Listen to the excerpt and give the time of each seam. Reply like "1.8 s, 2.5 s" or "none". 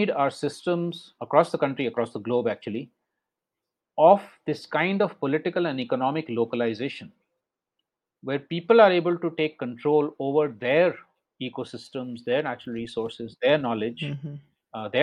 1.1 s